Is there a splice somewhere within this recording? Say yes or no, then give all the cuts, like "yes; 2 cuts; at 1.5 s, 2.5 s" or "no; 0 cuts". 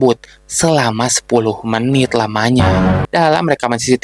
yes; 1 cut; at 3.0 s